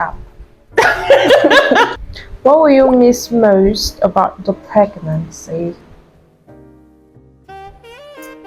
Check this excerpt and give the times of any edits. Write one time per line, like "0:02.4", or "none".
0:01.9